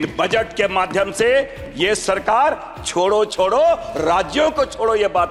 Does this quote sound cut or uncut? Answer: uncut